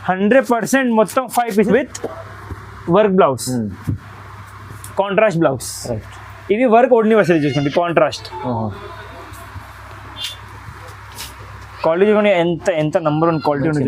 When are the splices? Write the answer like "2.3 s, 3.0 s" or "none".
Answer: 1.7 s